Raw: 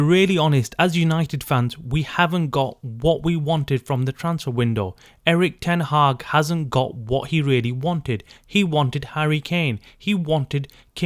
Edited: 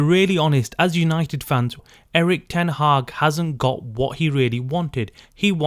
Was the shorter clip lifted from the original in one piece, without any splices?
no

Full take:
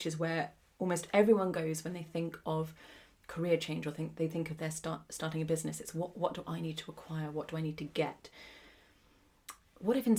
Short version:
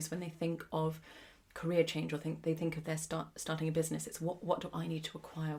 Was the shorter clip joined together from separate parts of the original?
no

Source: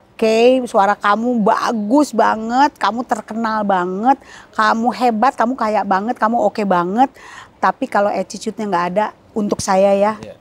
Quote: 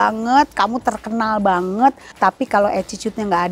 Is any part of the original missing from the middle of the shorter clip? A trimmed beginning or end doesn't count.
yes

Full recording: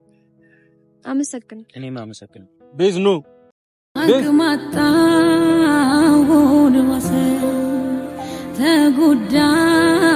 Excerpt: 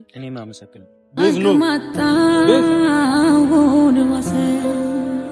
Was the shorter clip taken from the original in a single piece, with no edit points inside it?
no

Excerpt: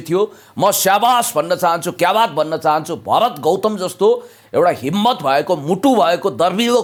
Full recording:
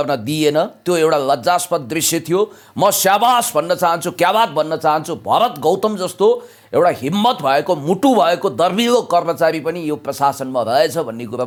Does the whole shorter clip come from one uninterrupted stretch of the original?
yes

